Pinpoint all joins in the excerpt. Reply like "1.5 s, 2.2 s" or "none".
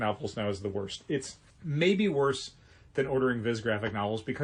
none